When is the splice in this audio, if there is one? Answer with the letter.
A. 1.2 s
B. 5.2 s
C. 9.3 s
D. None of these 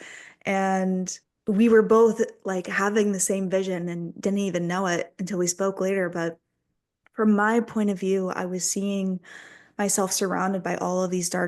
A